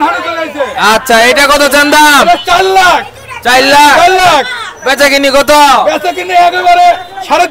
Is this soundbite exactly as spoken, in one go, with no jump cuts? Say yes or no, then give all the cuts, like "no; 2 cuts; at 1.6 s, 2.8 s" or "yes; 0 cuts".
yes; 0 cuts